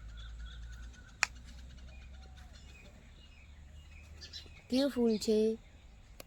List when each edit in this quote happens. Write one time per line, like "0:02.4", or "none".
none